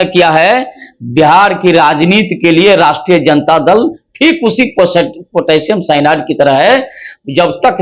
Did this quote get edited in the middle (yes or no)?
no